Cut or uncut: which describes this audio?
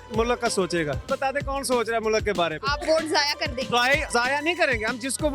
cut